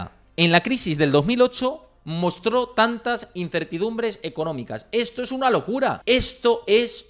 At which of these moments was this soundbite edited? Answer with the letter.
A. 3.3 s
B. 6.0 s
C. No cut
B